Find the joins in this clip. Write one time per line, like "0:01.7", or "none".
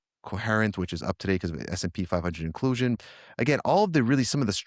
0:03.0